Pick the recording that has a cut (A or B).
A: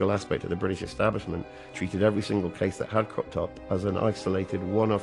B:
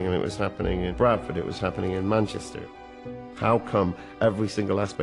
B